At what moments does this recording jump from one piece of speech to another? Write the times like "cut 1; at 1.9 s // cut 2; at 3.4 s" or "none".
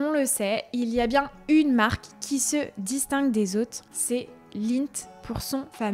none

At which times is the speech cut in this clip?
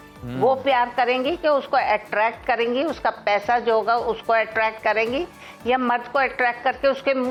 none

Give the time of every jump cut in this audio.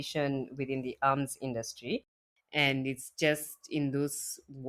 cut 1; at 2.2 s

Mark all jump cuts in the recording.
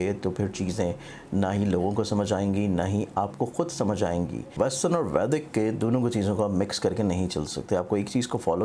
cut 1; at 4.5 s

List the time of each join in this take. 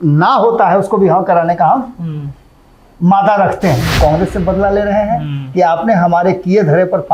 cut 1; at 3.9 s

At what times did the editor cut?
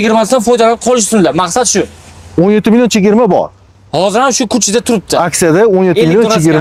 none

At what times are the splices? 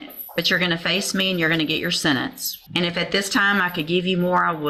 none

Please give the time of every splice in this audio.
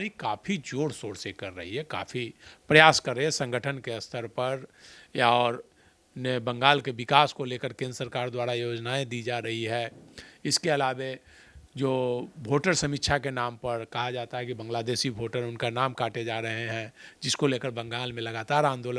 none

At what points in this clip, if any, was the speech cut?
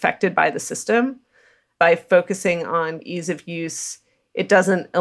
cut 1; at 1.6 s // cut 2; at 3.0 s

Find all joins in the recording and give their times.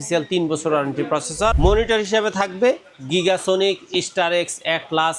cut 1; at 1.6 s

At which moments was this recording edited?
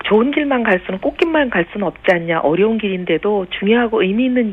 cut 1; at 3.0 s

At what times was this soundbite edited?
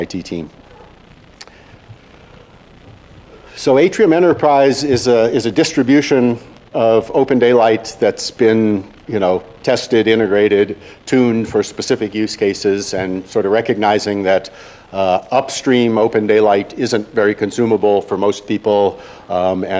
cut 1; at 15.5 s

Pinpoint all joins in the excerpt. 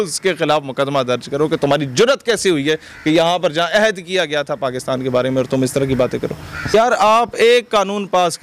cut 1; at 6.7 s

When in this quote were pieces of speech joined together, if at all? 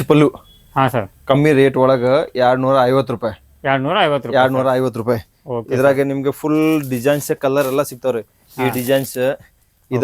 none

